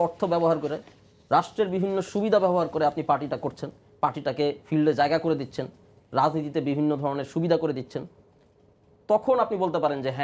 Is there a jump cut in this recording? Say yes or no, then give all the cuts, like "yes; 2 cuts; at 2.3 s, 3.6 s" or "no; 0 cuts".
no; 0 cuts